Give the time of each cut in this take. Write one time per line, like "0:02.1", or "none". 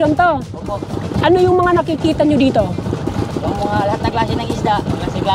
0:01.0

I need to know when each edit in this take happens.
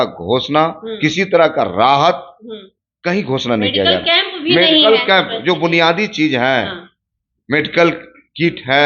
none

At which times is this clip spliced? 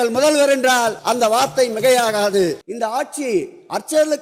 0:01.0
0:02.6

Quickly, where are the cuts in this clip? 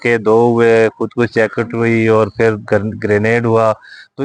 none

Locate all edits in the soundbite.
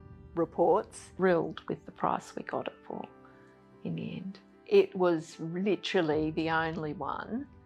0:01.1
0:04.5

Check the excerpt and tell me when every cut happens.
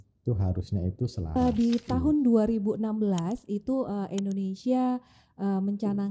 0:01.4

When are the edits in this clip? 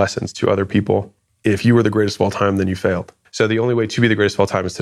none

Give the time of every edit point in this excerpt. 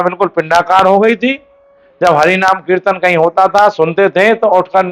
none

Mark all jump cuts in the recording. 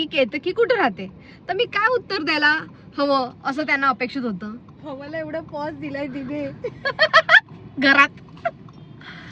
none

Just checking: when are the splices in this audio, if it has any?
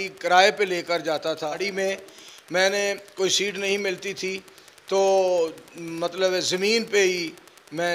0:01.7

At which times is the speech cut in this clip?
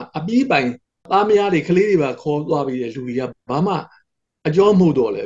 0:01.0

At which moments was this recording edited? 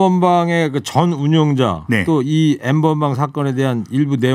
none

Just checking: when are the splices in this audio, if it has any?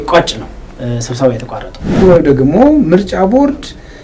0:02.0

